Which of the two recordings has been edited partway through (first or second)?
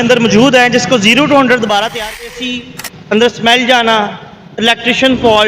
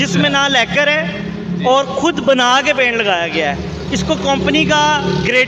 first